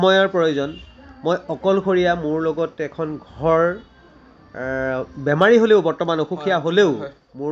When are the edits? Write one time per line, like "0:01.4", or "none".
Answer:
none

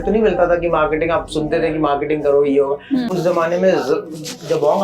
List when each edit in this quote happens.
0:03.1

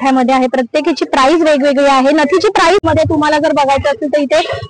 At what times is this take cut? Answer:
0:02.8

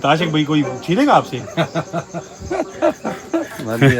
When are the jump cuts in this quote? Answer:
none

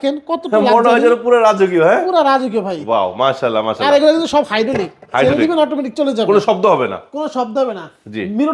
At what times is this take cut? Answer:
none

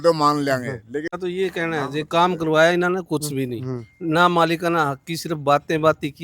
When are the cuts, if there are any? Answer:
0:01.1

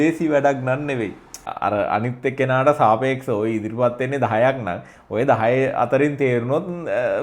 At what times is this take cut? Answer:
0:01.5

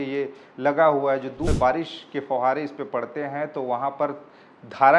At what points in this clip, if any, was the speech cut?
0:01.5

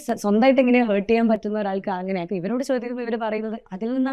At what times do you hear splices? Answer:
none

